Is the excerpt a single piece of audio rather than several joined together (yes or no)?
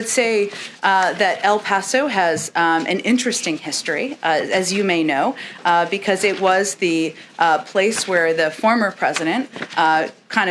yes